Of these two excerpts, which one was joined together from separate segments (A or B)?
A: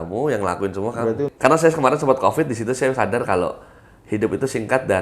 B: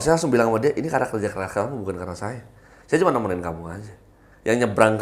A